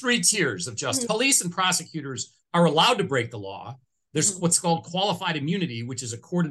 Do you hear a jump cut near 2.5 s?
no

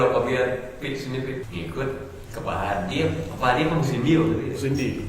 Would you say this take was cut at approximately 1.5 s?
yes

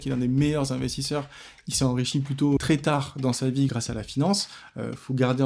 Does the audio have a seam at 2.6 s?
yes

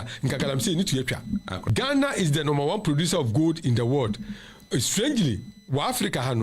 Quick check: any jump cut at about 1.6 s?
yes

